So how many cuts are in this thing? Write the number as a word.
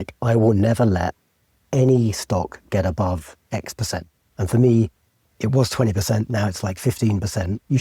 zero